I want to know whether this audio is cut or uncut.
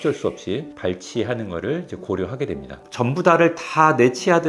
cut